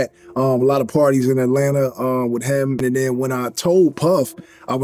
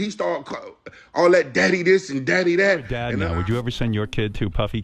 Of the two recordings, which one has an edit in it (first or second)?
second